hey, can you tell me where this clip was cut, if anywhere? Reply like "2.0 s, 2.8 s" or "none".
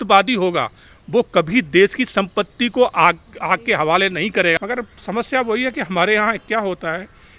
4.6 s